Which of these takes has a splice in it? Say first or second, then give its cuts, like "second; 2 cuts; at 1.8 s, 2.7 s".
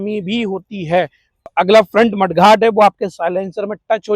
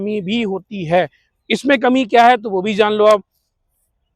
first; 1 cut; at 1.5 s